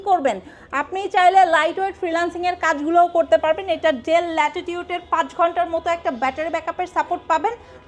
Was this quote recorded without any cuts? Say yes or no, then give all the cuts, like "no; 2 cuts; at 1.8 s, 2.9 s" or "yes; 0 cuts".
yes; 0 cuts